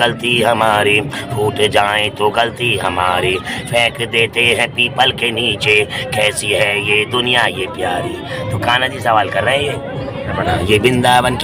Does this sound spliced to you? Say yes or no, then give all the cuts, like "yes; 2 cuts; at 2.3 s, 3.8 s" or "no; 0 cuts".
yes; 1 cut; at 10.3 s